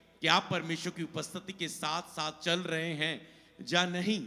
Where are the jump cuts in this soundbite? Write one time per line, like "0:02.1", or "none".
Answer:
none